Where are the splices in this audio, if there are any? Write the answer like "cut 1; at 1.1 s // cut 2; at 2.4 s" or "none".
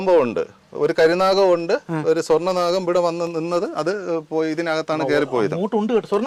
none